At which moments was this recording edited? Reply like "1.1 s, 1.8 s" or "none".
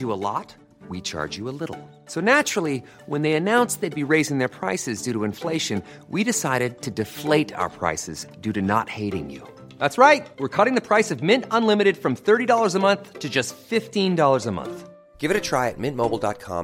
none